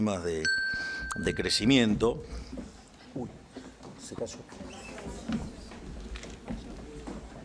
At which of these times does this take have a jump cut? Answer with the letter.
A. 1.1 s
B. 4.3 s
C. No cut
C